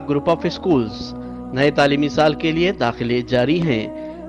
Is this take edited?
no; 0 cuts

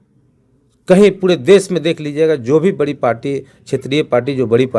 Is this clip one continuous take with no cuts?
yes; 0 cuts

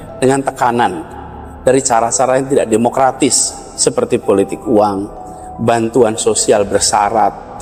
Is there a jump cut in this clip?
no; 0 cuts

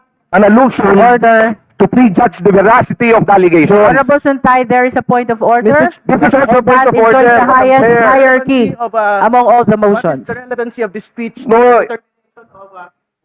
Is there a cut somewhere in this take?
no; 0 cuts

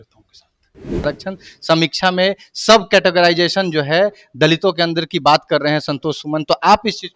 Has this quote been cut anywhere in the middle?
yes; 1 cut; at 1.0 s

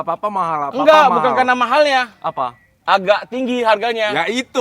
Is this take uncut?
yes; 0 cuts

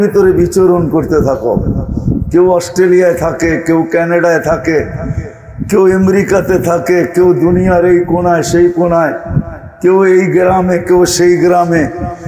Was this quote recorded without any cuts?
yes; 0 cuts

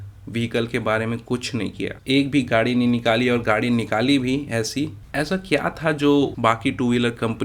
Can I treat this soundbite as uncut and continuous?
no; 2 cuts; at 2.0 s, 5.0 s

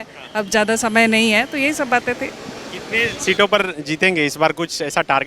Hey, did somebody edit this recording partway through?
no; 0 cuts

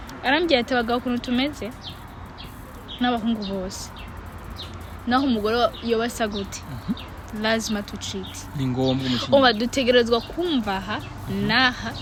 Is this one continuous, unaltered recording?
yes; 0 cuts

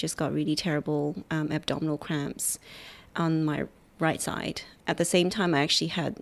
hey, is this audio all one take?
no; 1 cut; at 4.7 s

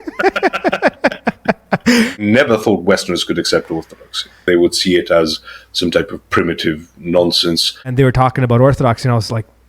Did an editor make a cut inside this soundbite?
yes; 3 cuts; at 2.2 s, 4.4 s, 7.8 s

